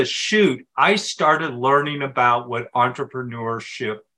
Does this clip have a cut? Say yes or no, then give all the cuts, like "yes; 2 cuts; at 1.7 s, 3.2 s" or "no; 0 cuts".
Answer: no; 0 cuts